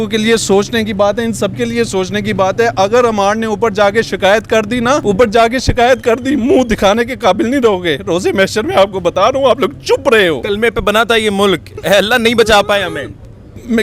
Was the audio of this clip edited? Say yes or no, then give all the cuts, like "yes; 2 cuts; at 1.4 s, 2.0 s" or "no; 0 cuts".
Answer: yes; 2 cuts; at 5.0 s, 10.4 s